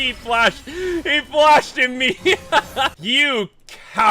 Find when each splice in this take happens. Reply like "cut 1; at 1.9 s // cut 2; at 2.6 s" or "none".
cut 1; at 2.9 s